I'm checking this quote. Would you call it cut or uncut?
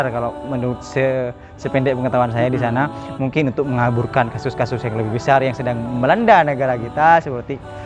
uncut